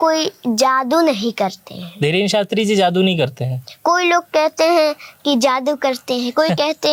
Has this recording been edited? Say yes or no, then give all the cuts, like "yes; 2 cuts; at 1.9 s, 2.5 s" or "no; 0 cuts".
no; 0 cuts